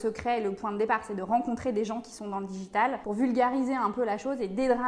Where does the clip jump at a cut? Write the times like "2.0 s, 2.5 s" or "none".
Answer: none